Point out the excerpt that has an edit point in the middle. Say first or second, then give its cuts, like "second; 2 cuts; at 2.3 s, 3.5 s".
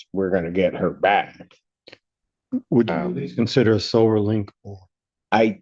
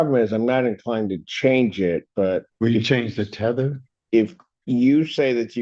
second; 1 cut; at 2.5 s